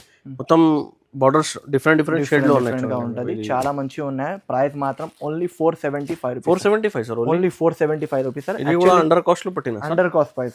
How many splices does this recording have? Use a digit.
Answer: 0